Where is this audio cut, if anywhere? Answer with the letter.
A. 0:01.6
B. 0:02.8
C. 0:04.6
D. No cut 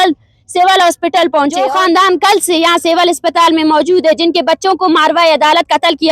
A